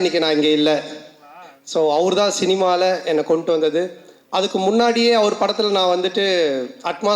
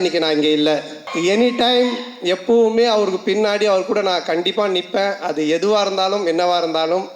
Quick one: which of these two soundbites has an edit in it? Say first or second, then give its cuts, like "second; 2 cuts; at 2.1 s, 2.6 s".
second; 1 cut; at 1.0 s